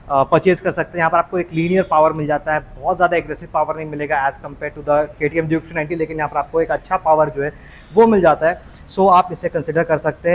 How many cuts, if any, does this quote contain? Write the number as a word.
zero